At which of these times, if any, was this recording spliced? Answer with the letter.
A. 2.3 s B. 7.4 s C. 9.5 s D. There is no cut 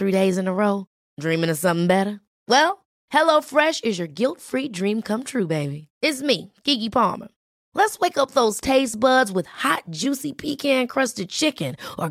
D